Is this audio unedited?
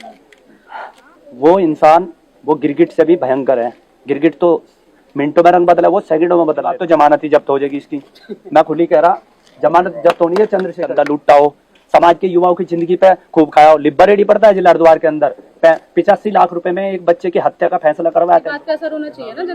no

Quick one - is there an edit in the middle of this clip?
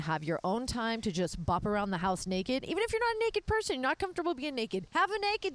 no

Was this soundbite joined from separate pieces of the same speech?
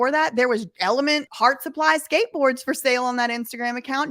yes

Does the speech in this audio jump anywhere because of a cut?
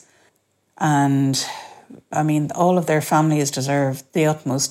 yes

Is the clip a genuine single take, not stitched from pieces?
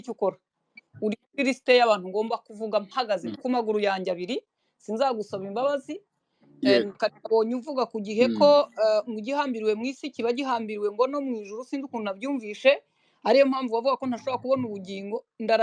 yes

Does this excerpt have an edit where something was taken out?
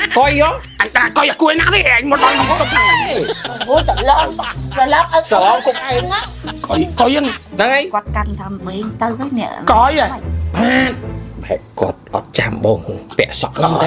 no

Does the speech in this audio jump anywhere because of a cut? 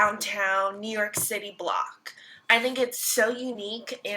yes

